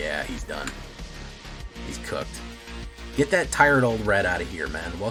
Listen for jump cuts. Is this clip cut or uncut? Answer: uncut